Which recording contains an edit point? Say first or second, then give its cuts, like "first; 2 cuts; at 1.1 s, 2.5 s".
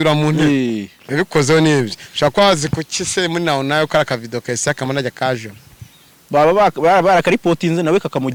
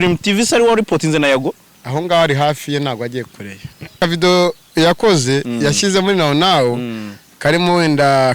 second; 1 cut; at 4.0 s